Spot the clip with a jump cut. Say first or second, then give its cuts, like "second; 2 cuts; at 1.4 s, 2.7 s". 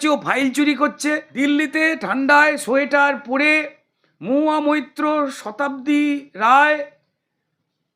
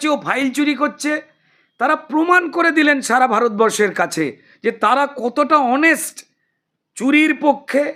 first; 1 cut; at 1.3 s